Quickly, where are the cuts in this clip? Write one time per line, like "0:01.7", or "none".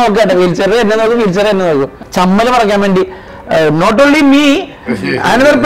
0:02.0